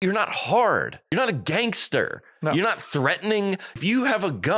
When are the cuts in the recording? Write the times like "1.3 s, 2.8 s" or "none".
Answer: 1.1 s, 3.8 s

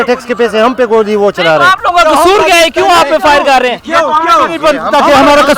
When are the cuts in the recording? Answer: none

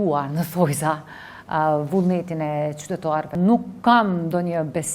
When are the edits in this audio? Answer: 3.3 s

